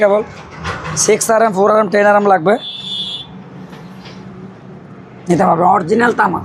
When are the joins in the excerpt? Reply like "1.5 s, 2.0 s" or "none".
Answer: none